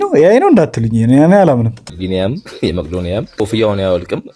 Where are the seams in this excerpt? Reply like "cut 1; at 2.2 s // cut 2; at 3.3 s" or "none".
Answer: cut 1; at 1.8 s // cut 2; at 3.4 s